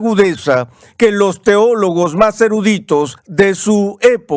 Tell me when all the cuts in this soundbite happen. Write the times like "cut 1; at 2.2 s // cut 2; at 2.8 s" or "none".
cut 1; at 3.2 s